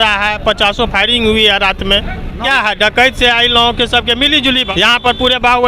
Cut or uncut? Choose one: cut